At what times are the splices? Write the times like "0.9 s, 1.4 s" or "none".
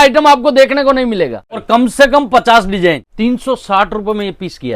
1.6 s, 3.1 s